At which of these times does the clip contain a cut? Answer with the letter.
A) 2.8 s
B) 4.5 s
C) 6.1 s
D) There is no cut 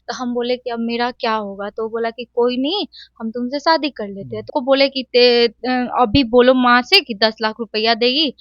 B